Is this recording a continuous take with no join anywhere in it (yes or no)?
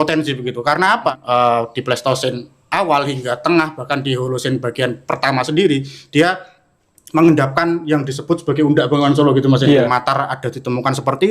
no